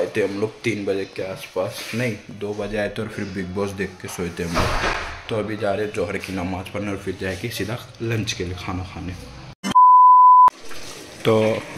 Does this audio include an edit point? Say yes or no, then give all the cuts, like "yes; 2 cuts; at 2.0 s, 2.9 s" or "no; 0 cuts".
no; 0 cuts